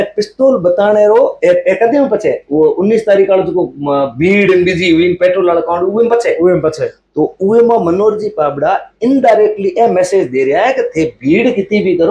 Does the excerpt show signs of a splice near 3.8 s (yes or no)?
no